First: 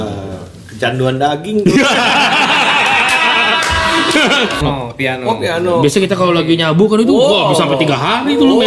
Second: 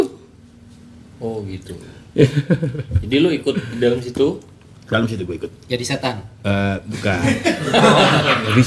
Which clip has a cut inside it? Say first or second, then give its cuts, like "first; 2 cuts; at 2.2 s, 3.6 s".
first; 1 cut; at 4.6 s